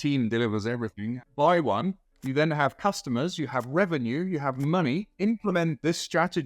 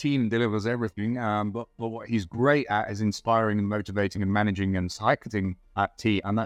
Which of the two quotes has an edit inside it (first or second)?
first